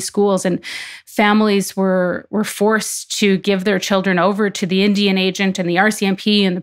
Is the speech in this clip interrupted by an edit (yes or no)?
no